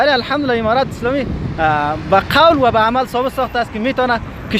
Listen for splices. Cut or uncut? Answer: uncut